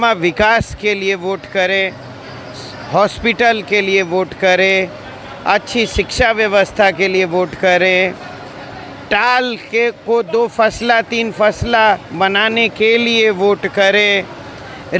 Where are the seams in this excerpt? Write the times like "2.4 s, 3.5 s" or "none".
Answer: none